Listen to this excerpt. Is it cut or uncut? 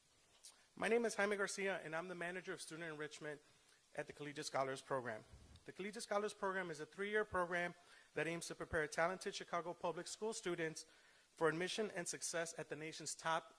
cut